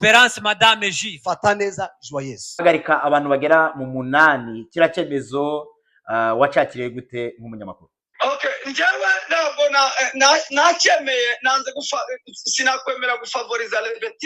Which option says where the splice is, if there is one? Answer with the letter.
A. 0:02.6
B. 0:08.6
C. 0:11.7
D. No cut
A